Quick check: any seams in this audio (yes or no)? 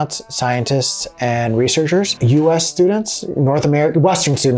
yes